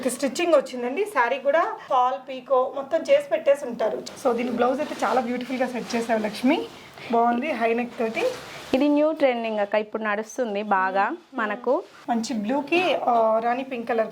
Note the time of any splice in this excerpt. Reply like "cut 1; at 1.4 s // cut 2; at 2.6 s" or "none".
cut 1; at 1.8 s // cut 2; at 4.0 s // cut 3; at 11.9 s